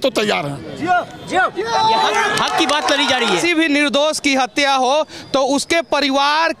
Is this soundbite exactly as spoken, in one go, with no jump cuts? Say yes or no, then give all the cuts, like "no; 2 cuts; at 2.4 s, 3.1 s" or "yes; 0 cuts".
no; 1 cut; at 3.4 s